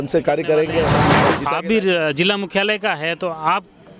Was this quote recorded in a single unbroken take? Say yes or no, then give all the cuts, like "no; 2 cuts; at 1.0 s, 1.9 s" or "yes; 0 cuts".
no; 1 cut; at 1.2 s